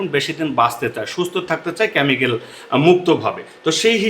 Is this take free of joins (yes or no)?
yes